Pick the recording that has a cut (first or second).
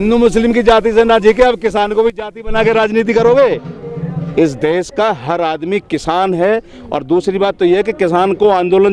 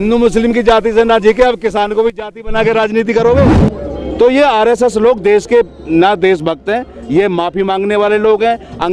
second